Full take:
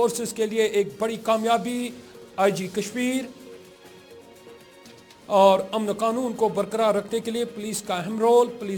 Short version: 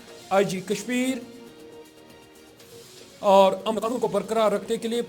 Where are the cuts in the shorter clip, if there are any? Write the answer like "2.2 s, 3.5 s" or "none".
4.1 s